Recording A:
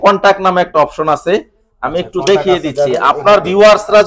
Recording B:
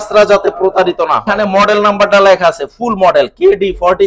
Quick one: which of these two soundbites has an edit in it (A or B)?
B